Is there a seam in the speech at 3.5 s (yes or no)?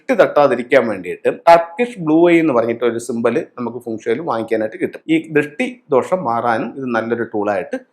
no